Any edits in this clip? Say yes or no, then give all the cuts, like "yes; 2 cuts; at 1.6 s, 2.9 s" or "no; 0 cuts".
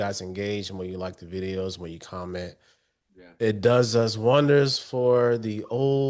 no; 0 cuts